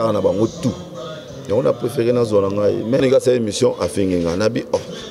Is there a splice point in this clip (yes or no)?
yes